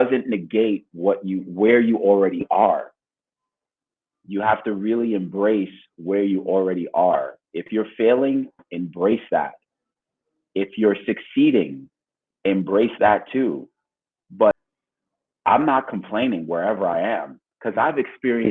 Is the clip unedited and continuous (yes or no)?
no